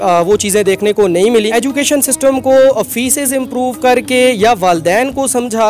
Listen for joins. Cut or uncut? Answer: cut